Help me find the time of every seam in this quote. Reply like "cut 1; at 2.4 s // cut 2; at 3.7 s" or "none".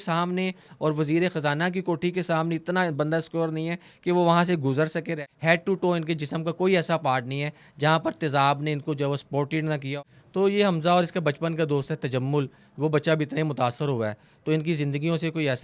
cut 1; at 5.2 s // cut 2; at 9.9 s